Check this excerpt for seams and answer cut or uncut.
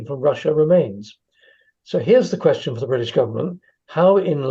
uncut